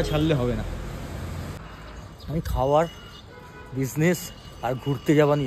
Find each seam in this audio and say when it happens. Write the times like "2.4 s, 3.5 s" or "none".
1.6 s